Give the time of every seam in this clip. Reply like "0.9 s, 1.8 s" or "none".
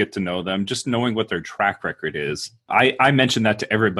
2.7 s

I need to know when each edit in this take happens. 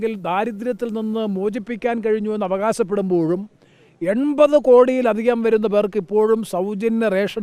none

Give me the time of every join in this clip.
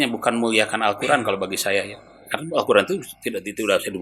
none

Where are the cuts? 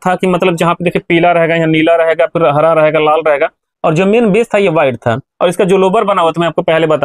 none

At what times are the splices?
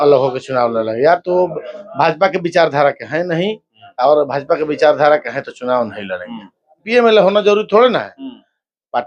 6.8 s

